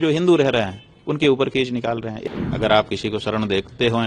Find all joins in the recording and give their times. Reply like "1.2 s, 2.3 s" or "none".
2.2 s